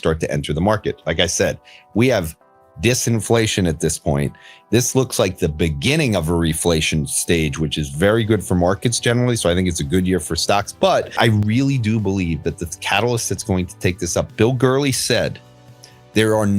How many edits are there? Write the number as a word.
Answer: one